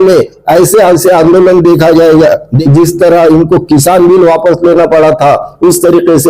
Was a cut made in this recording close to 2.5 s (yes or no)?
yes